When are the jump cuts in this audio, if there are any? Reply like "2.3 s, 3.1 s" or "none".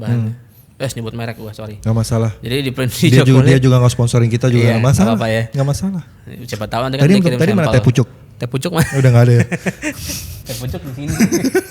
none